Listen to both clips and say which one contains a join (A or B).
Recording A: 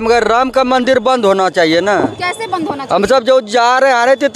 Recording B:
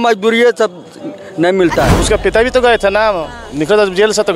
B